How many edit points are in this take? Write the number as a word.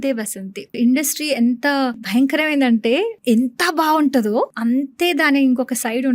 four